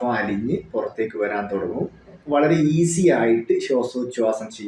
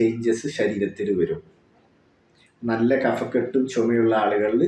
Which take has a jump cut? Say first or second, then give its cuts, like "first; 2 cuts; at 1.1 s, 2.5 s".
first; 1 cut; at 2.2 s